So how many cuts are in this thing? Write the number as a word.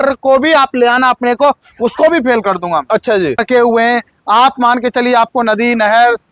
one